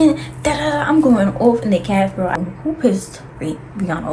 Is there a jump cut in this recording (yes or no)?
yes